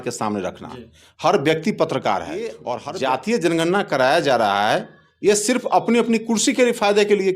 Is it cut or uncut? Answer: cut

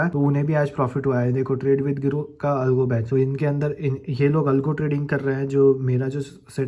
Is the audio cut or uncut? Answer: uncut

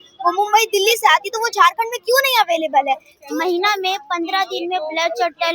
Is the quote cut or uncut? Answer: cut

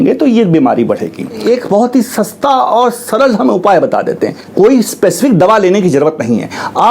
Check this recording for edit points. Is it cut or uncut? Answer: cut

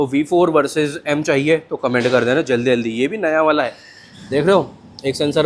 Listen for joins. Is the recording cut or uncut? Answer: uncut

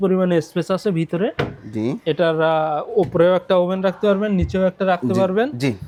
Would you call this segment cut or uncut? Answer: uncut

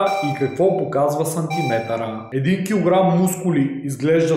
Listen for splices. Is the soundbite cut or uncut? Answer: cut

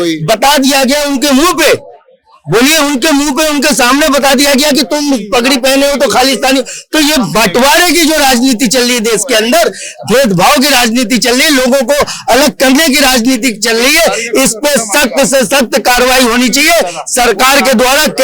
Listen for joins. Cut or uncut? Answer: uncut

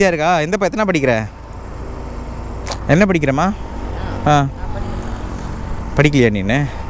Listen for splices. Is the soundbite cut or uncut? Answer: uncut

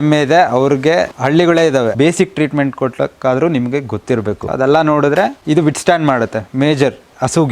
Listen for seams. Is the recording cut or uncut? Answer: cut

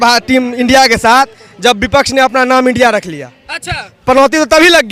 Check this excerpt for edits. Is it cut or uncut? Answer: uncut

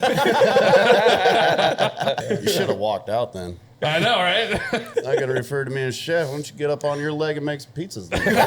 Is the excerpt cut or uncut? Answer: cut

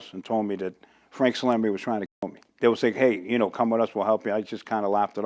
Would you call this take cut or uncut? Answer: uncut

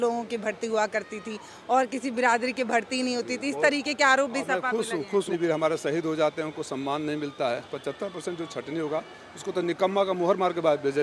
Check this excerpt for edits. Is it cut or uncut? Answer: cut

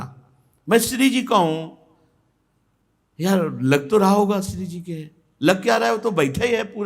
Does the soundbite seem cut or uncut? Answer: uncut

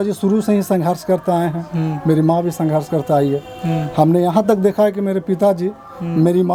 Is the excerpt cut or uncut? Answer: uncut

